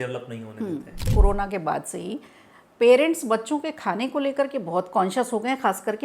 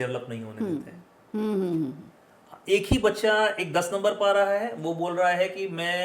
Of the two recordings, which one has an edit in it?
first; 1 cut; at 1.1 s

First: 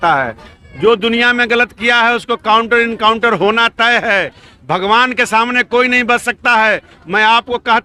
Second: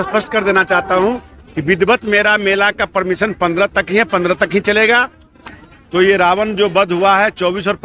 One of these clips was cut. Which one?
second; 1 cut; at 5.4 s

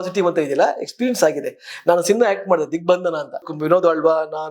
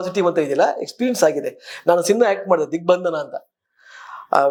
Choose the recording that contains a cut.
first; 1 cut; at 3.5 s

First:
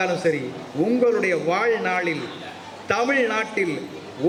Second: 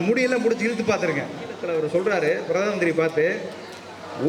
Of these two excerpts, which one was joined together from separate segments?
second; 1 cut; at 1.6 s

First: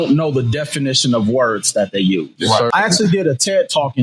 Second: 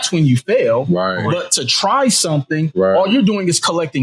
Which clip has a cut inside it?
first; 1 cut; at 2.7 s

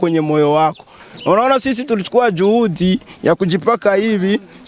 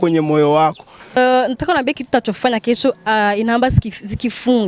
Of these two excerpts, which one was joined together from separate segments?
second; 1 cut; at 1.2 s

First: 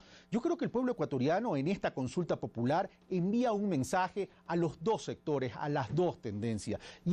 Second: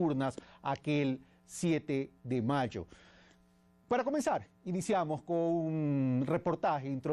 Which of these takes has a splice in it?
first; 1 cut; at 3.7 s

